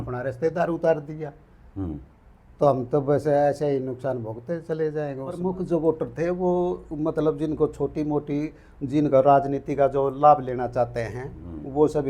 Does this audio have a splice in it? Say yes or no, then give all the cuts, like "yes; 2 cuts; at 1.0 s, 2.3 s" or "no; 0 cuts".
yes; 1 cut; at 5.4 s